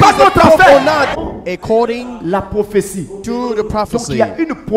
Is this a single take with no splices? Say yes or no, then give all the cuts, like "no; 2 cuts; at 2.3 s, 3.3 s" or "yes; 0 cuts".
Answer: no; 1 cut; at 1.2 s